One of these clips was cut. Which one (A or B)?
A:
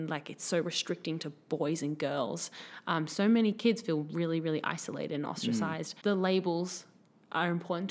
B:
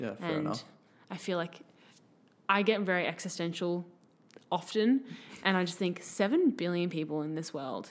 A